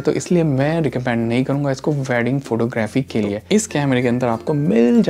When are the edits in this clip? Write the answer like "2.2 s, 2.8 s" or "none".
3.4 s